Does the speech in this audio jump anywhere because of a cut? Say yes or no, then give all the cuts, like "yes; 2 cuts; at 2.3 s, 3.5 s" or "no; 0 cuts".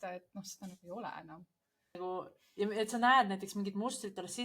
yes; 1 cut; at 2.0 s